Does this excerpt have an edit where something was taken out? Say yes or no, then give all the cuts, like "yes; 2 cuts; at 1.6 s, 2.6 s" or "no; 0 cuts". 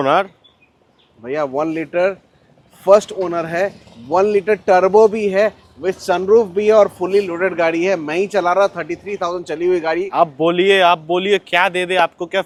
no; 0 cuts